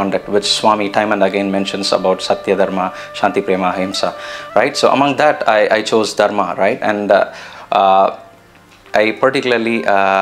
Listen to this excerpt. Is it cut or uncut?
cut